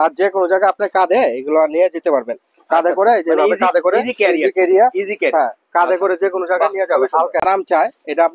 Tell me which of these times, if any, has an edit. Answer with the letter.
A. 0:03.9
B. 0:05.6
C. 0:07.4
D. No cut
C